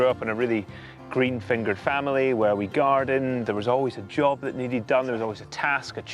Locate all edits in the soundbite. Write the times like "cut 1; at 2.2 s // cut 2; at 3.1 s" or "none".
none

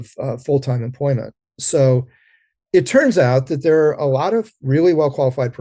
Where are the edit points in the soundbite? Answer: cut 1; at 4.6 s

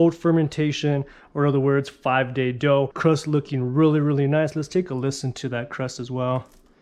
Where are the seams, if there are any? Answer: cut 1; at 2.9 s

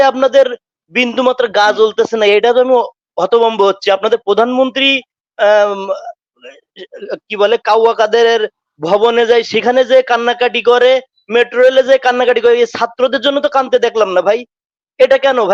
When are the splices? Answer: none

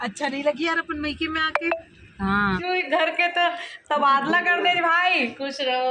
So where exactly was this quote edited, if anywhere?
cut 1; at 2.6 s

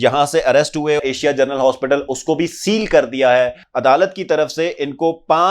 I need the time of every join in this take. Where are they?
cut 1; at 1.0 s // cut 2; at 3.6 s

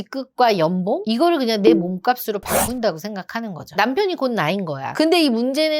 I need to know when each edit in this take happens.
none

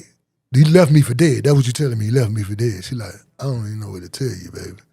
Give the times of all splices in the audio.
none

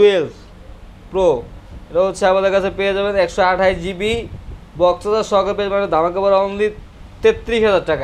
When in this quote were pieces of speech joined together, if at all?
none

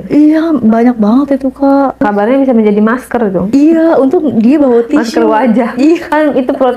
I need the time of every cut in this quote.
cut 1; at 2.0 s // cut 2; at 3.4 s

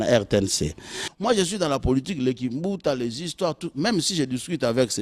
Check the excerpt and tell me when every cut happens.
cut 1; at 1.0 s

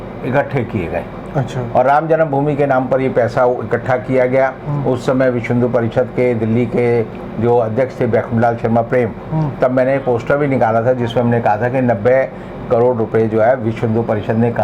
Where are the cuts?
none

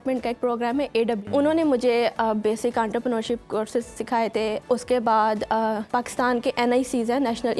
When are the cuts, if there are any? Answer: cut 1; at 1.3 s // cut 2; at 4.6 s // cut 3; at 5.8 s

